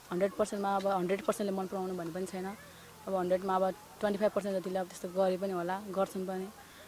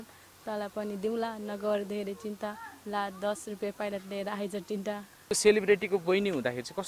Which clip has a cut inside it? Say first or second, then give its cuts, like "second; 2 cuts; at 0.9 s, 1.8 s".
second; 1 cut; at 5.3 s